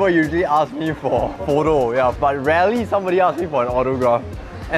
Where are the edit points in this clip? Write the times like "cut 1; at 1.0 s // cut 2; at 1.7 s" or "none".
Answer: cut 1; at 2.2 s